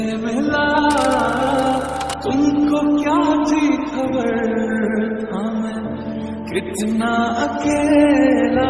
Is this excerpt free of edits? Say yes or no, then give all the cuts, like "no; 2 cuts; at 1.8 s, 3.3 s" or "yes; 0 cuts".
yes; 0 cuts